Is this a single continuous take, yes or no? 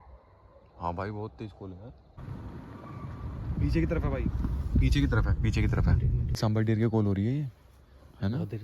no